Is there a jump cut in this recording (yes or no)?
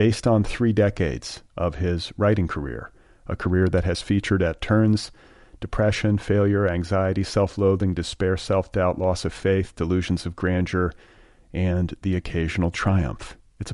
no